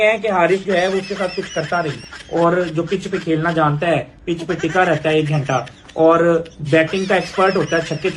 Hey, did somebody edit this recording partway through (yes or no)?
yes